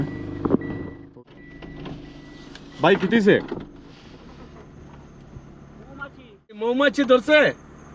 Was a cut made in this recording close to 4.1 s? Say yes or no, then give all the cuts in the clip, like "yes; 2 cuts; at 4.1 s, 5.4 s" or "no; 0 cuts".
no; 2 cuts; at 1.1 s, 6.7 s